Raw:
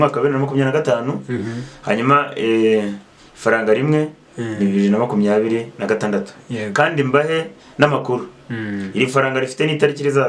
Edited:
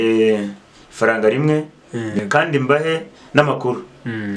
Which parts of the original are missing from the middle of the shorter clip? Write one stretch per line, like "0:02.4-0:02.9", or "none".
0:04.6-0:06.6